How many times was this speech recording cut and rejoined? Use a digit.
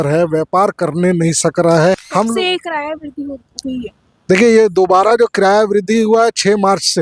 1